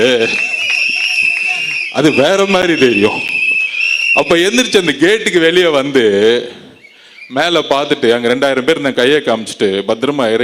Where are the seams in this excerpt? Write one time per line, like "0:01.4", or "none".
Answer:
none